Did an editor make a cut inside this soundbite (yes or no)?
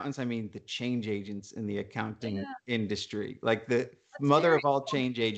no